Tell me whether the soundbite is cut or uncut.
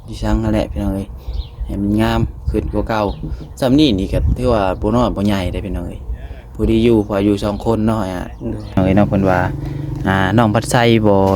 cut